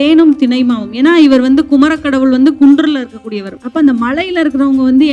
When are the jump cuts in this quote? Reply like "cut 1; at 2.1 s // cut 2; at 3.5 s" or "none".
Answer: cut 1; at 3.6 s